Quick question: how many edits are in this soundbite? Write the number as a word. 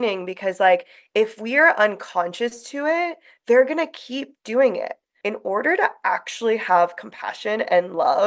one